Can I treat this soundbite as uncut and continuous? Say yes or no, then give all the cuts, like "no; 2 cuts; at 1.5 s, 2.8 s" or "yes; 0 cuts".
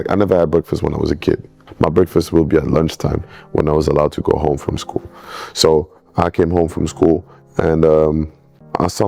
yes; 0 cuts